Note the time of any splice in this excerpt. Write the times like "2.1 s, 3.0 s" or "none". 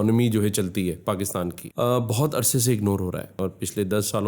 1.6 s, 3.3 s